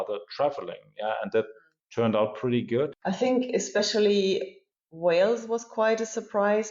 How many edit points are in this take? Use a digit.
1